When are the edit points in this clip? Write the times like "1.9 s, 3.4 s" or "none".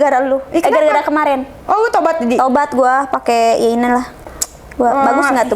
none